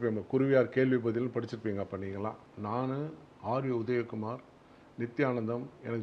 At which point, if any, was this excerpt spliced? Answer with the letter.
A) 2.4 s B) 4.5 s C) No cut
A